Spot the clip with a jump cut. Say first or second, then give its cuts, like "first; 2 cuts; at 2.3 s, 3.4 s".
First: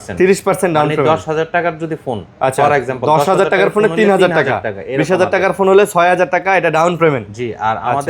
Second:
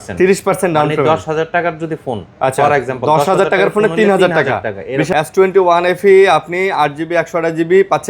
second; 1 cut; at 5.1 s